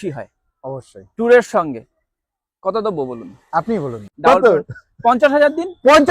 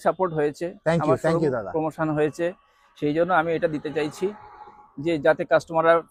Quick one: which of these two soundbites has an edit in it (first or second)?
first